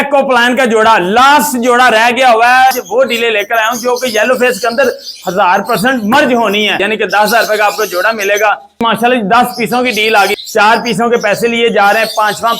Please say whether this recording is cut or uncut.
cut